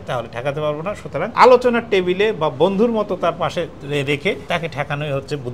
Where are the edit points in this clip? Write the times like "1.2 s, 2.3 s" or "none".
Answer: 1.3 s, 4.4 s

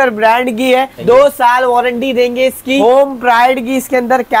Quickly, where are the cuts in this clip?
0.9 s, 2.8 s

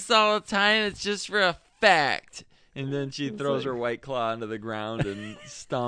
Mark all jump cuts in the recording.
none

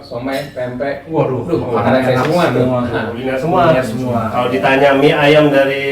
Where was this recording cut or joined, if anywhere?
3.2 s

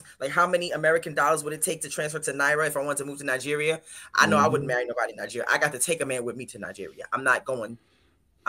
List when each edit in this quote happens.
none

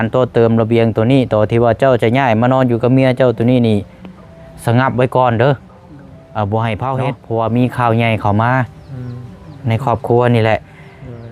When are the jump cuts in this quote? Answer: 7.2 s

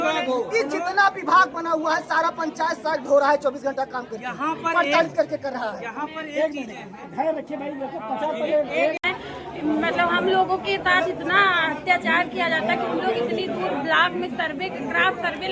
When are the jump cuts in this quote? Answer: 9.1 s

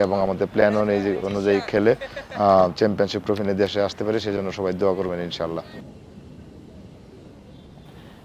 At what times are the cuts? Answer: none

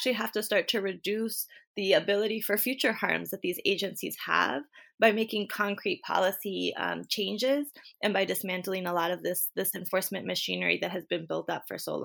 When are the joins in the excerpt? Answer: none

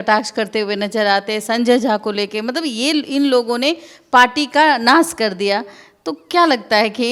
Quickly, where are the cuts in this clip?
none

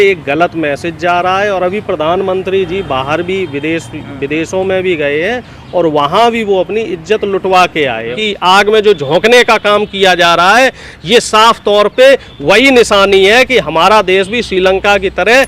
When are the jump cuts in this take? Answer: 8.2 s

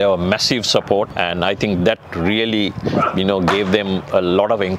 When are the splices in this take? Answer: 1.1 s

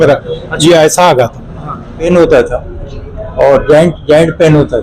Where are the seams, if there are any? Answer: 2.0 s

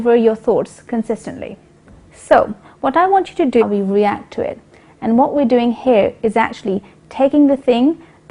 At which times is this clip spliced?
none

